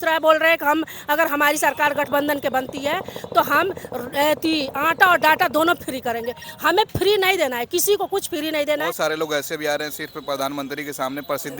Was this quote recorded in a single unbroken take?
no; 1 cut; at 8.9 s

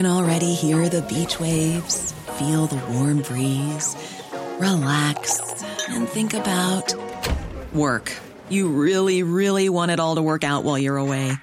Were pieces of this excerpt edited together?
no; 0 cuts

